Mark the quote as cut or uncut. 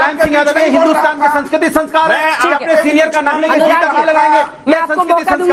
uncut